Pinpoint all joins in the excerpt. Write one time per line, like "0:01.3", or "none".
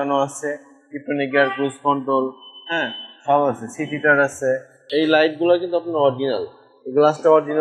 0:04.8